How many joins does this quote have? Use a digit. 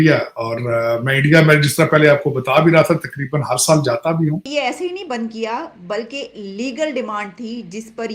1